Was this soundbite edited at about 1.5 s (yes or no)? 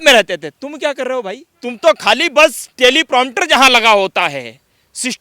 yes